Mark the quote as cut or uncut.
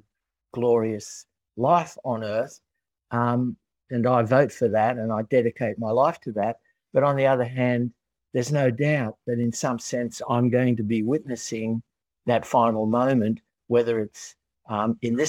uncut